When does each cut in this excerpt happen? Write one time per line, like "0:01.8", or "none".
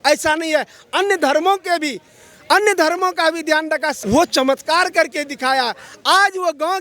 0:03.9